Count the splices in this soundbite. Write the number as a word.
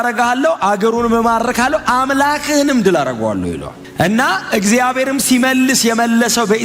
zero